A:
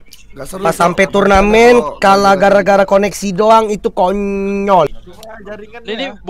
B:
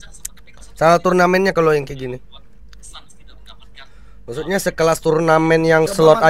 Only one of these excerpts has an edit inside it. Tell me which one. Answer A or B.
A